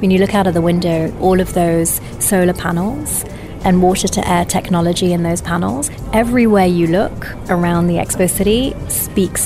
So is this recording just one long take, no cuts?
no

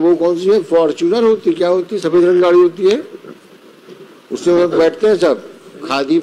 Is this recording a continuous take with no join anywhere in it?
yes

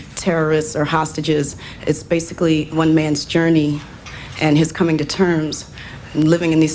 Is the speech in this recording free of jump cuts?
yes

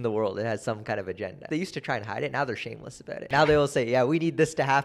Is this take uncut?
no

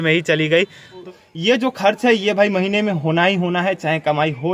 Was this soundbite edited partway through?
yes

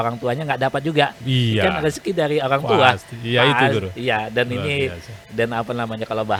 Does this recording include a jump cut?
no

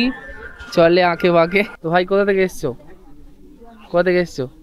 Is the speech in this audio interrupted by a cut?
yes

